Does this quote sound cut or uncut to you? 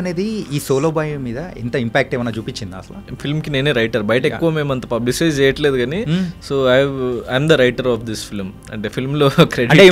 cut